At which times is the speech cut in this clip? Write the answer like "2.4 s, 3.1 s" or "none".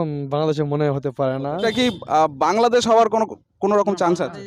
1.6 s